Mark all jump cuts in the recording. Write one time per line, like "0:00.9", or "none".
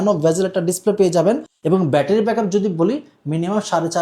0:01.5